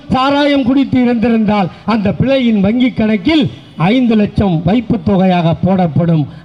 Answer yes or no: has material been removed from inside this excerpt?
no